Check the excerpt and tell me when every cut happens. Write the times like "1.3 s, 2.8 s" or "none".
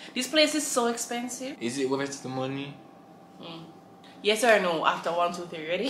1.5 s